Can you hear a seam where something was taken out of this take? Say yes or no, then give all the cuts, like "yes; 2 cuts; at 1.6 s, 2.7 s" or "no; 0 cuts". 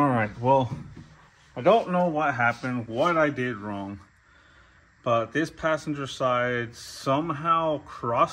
no; 0 cuts